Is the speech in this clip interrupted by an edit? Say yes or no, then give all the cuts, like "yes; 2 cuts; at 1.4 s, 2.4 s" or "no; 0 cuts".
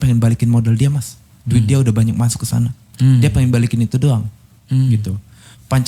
no; 0 cuts